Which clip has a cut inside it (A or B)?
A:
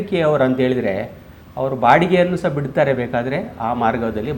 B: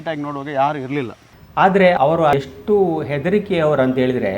B